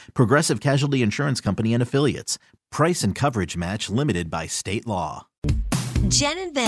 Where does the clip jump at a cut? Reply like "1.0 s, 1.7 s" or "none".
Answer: 5.4 s

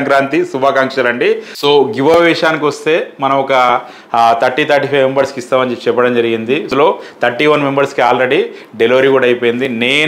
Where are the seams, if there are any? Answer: 1.6 s, 6.7 s

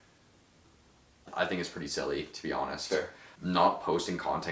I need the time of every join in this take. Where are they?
1.3 s, 3.2 s

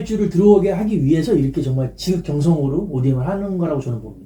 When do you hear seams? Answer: none

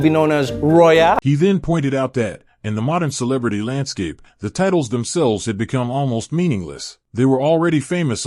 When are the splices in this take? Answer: none

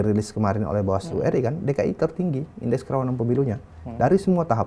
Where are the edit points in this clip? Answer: none

